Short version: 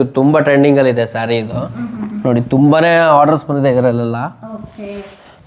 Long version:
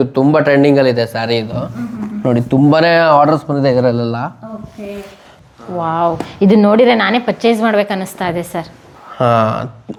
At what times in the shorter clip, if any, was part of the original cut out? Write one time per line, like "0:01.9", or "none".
none